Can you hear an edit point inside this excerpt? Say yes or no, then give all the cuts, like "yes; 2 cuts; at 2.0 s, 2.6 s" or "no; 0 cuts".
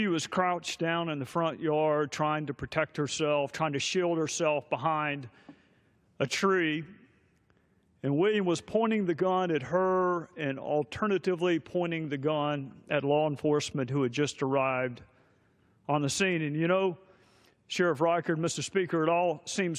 yes; 1 cut; at 8.2 s